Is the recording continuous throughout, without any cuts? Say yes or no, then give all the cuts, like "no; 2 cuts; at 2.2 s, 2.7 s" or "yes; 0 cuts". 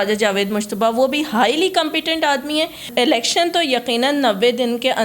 no; 1 cut; at 2.9 s